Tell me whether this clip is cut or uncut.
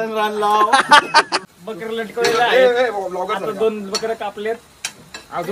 cut